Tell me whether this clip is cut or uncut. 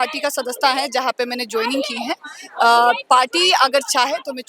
uncut